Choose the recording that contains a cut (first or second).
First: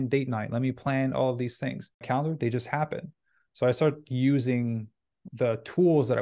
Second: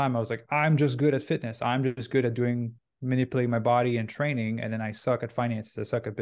first